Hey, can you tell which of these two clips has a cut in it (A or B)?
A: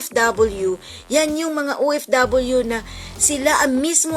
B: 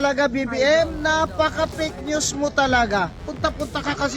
B